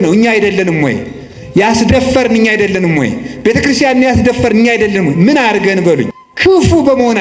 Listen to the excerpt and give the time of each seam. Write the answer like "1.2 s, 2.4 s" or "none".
6.2 s